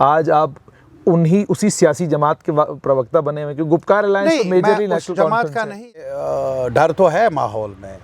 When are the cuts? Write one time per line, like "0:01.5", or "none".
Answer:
0:06.1